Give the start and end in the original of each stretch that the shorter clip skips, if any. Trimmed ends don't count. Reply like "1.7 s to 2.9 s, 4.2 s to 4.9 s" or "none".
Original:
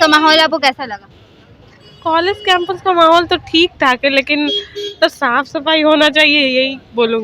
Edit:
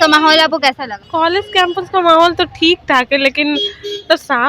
0.9 s to 1.9 s